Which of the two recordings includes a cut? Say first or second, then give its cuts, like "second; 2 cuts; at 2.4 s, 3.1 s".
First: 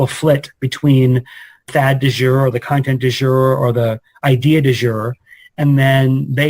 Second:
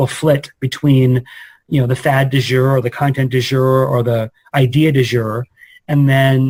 first; 1 cut; at 1.6 s